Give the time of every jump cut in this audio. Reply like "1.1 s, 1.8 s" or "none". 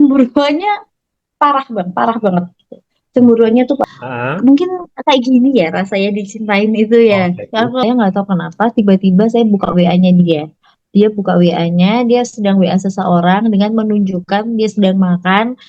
3.8 s, 7.8 s